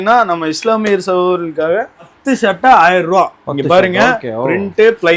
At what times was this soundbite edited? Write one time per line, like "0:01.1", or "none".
0:02.1